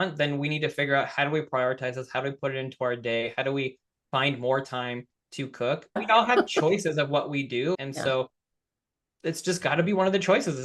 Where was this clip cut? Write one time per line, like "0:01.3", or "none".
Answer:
0:06.0
0:07.8